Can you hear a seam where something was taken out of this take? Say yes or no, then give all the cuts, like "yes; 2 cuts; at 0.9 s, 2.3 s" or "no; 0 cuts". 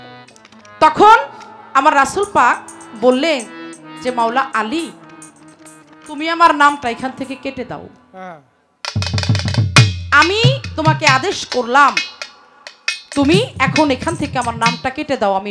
no; 0 cuts